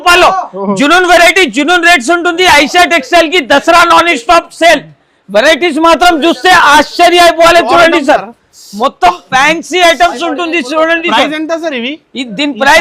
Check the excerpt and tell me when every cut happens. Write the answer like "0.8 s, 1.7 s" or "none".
none

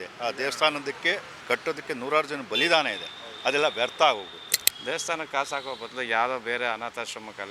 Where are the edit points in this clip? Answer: 1.3 s, 4.3 s

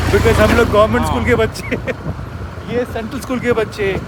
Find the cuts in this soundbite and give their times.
none

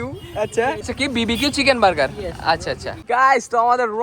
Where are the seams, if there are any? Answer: 0.8 s, 2.9 s

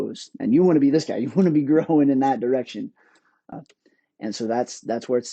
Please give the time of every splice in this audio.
3.5 s

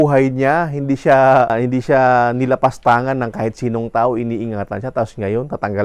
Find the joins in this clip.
1.5 s

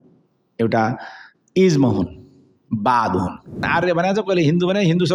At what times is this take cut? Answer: 3.7 s

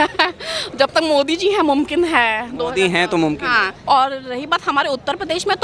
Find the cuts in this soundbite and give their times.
none

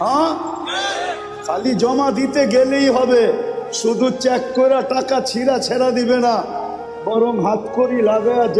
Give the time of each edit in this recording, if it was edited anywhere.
none

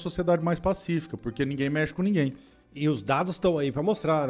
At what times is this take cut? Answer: none

